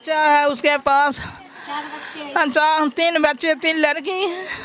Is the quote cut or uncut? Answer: uncut